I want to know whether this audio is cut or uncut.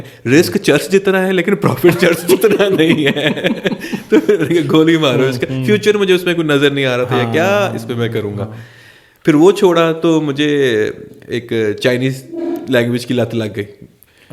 uncut